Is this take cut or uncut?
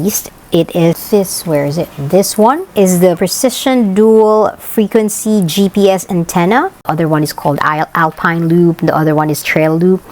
cut